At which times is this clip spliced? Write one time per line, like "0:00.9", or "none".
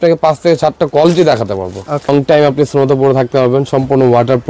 0:02.1